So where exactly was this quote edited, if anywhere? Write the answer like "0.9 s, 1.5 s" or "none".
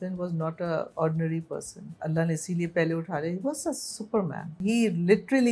0.9 s, 2.0 s, 4.6 s

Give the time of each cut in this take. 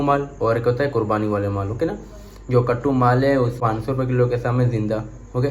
3.6 s

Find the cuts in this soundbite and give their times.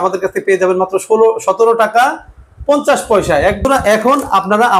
3.6 s

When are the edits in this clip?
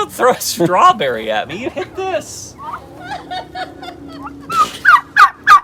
none

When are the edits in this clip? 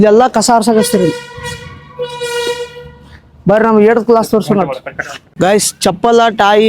none

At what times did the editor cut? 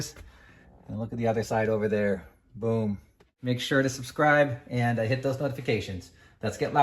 3.3 s

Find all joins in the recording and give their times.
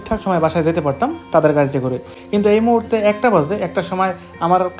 none

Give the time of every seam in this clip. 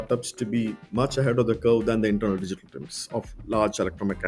none

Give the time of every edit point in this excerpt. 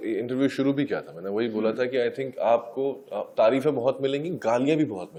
none

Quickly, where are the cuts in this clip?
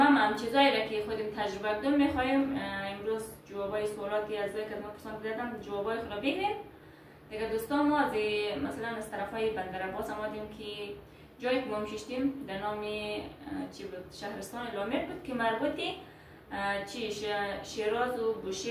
none

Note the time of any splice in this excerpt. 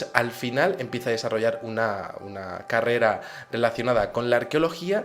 2.7 s

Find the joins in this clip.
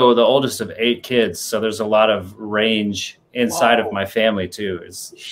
none

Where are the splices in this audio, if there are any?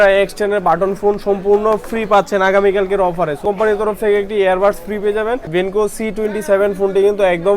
3.4 s, 5.8 s

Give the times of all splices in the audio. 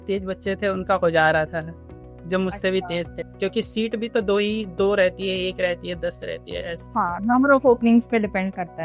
3.2 s

